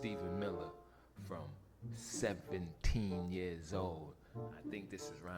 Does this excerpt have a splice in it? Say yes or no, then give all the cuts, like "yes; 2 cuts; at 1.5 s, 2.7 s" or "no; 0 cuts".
no; 0 cuts